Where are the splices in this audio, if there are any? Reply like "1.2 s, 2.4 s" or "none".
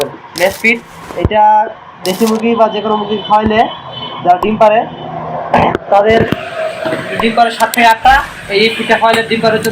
none